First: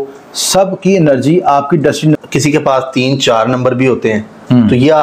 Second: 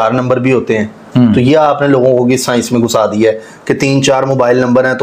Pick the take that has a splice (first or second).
first